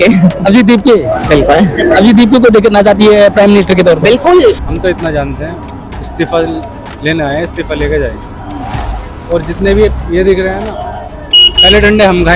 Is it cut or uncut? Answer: cut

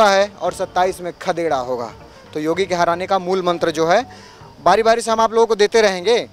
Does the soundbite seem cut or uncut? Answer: uncut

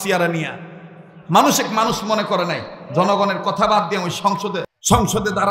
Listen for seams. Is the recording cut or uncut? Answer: cut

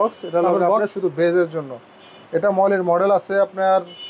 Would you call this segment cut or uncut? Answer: uncut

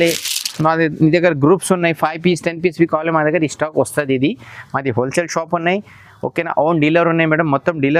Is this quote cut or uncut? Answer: uncut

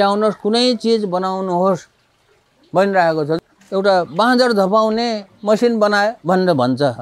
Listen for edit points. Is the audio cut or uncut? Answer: cut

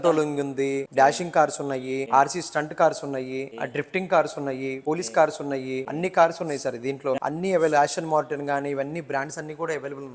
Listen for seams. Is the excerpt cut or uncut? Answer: cut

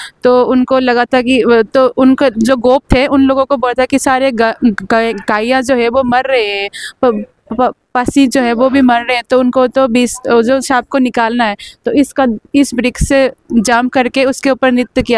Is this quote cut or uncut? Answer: uncut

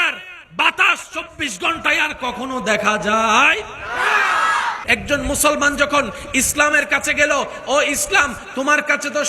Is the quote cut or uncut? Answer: cut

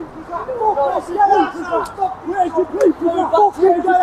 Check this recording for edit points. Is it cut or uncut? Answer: uncut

